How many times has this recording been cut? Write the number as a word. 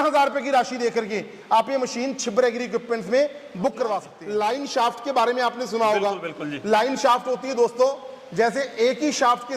one